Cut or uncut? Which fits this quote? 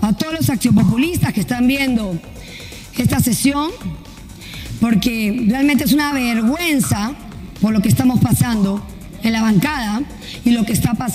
uncut